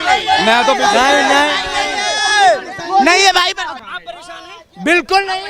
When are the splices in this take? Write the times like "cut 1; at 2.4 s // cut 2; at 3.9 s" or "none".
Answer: cut 1; at 3.8 s